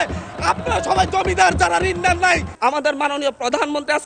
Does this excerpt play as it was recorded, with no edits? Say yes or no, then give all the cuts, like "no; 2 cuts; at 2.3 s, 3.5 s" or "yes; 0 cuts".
no; 1 cut; at 2.5 s